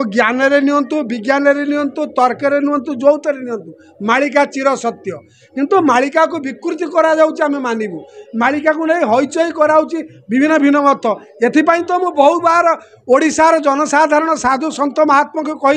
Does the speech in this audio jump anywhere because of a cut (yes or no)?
no